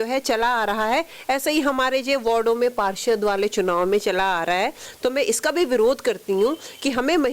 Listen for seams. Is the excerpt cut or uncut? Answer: uncut